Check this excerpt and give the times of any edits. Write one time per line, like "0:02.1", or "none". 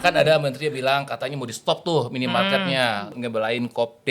0:03.2